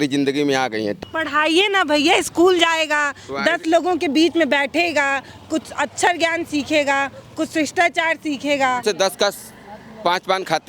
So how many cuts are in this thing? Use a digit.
2